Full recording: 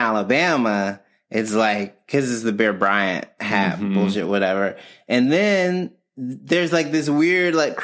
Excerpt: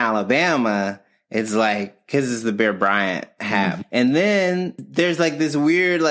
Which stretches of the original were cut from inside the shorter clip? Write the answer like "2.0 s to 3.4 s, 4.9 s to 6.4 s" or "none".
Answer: 3.8 s to 5.0 s, 6.0 s to 6.3 s